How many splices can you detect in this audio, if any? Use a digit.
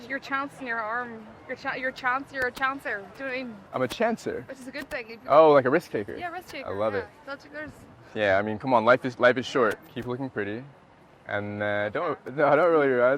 1